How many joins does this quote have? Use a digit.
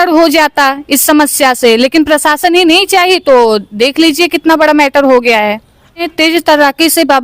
1